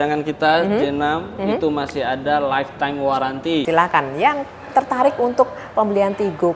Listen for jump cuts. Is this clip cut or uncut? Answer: cut